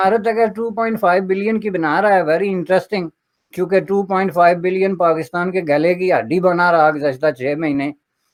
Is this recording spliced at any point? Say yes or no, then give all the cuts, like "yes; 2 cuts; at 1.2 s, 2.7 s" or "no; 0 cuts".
no; 0 cuts